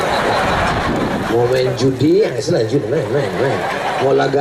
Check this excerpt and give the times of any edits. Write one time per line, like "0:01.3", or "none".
none